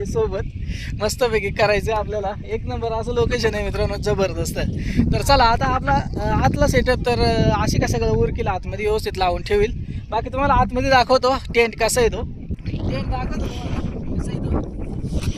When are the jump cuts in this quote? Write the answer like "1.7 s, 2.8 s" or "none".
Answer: none